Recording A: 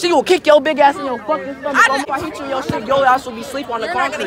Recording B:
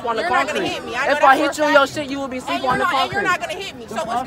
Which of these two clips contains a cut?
A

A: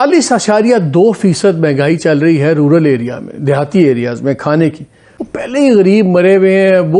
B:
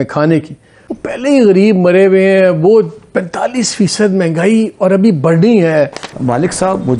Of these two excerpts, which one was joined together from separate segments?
B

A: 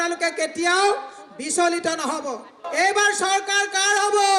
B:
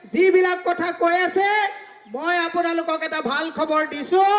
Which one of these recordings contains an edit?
A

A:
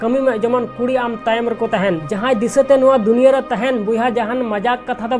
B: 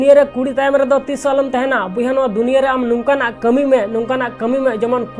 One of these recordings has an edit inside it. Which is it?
A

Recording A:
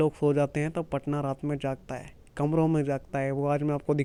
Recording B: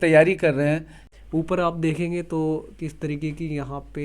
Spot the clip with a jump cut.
B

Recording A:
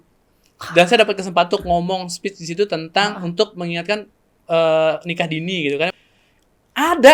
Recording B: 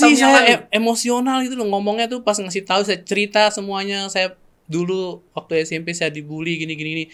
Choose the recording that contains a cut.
A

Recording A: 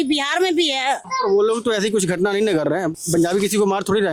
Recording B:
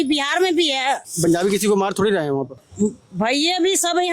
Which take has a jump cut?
B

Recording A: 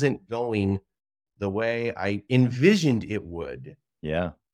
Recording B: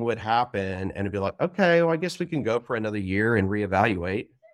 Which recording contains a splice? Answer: A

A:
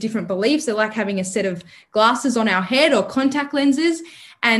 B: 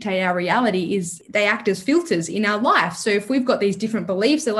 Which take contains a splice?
B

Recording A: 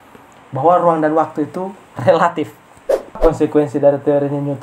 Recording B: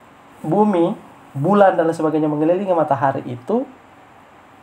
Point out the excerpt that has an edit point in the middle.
A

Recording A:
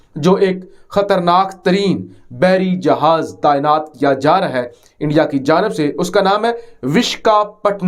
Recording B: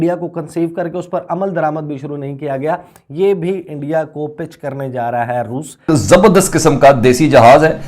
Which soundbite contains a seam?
B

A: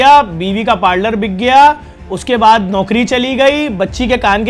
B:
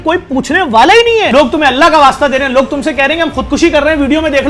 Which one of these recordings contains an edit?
B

